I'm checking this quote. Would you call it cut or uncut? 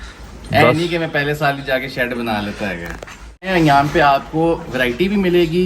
cut